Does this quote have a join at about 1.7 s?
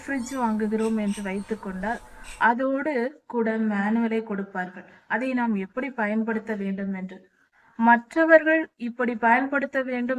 no; 0 cuts

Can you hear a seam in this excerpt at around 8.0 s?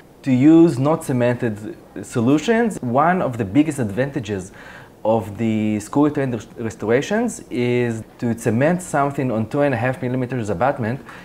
yes; 2 cuts; at 2.7 s, 8.0 s

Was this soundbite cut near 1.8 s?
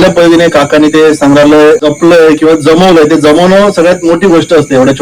yes; 1 cut; at 1.8 s

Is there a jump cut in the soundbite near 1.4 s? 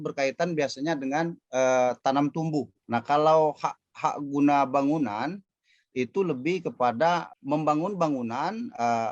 no; 1 cut; at 2.8 s

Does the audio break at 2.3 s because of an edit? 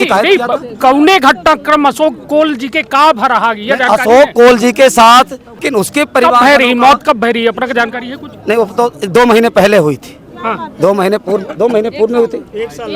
no; 1 cut; at 5.6 s

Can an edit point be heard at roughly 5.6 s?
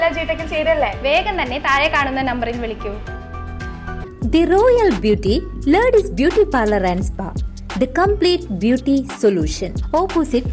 no; 1 cut; at 4.0 s

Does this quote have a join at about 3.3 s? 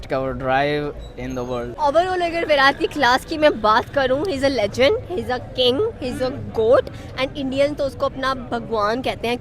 no; 1 cut; at 1.7 s

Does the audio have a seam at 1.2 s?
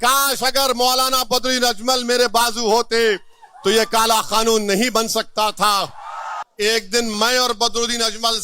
no; 1 cut; at 6.4 s

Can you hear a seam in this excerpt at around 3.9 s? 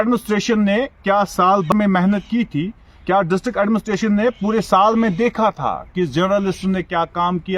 no; 1 cut; at 1.7 s

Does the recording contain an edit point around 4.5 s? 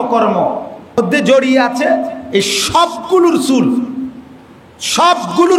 no; 1 cut; at 1.0 s

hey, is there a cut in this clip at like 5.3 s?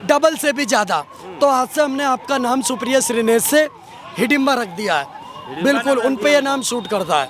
no; 0 cuts

